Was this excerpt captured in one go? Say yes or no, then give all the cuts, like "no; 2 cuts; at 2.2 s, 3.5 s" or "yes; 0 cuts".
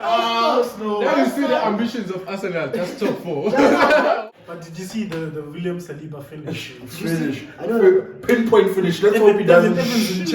no; 1 cut; at 4.3 s